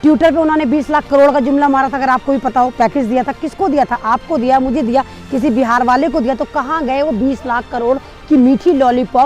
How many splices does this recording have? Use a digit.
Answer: 0